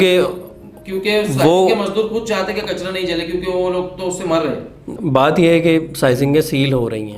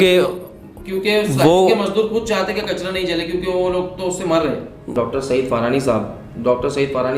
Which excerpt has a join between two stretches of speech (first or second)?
second